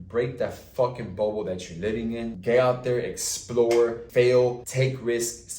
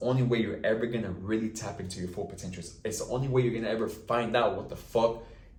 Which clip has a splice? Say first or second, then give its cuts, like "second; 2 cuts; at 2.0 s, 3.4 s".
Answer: first; 3 cuts; at 2.3 s, 4.0 s, 4.6 s